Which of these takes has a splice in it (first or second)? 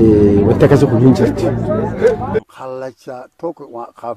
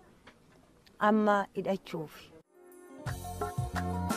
first